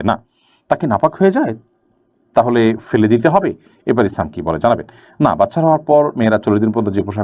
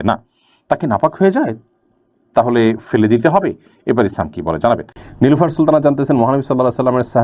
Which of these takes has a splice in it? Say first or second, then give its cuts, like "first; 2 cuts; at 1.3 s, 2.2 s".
second; 1 cut; at 5.0 s